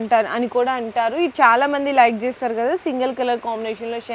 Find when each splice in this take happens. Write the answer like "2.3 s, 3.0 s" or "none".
none